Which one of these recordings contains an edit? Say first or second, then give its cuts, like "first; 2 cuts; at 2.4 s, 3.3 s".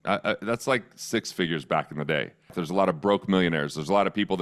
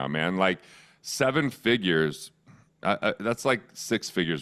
first; 1 cut; at 2.6 s